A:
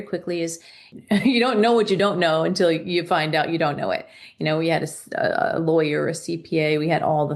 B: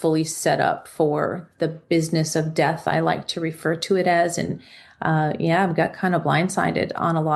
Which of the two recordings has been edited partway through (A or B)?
A